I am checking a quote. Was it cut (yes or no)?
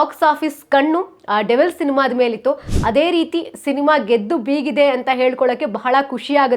no